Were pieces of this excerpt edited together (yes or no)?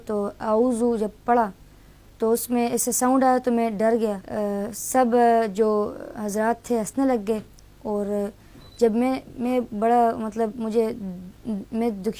yes